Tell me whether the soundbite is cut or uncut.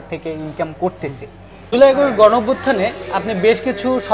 cut